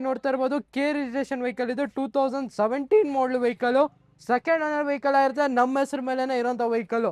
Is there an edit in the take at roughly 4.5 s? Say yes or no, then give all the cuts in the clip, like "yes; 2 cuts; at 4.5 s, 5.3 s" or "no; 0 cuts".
no; 0 cuts